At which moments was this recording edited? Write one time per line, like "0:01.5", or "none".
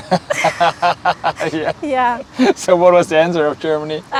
none